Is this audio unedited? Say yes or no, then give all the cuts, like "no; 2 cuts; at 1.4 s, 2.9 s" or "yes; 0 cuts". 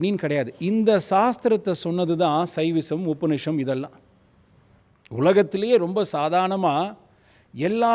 yes; 0 cuts